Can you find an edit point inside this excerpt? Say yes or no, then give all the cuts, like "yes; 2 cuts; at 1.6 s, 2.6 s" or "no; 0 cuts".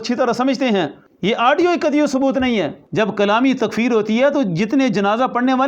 yes; 2 cuts; at 1.0 s, 2.8 s